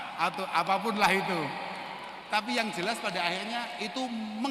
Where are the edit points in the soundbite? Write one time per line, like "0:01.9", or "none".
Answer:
none